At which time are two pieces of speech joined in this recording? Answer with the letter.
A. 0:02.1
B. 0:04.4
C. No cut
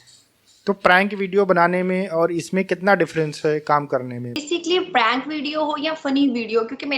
B